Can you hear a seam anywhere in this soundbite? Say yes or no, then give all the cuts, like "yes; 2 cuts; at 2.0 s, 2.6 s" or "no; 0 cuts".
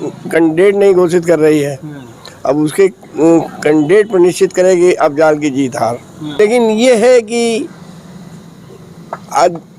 yes; 1 cut; at 6.4 s